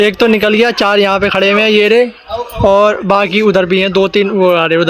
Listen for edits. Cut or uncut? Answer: uncut